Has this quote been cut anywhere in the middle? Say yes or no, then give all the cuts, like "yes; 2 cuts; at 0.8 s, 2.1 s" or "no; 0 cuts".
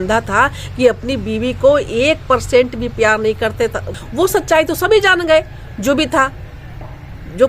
yes; 1 cut; at 3.9 s